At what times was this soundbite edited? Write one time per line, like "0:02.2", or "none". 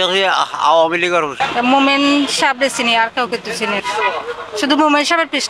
none